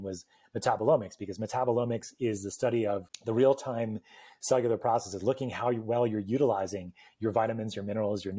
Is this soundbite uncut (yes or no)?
no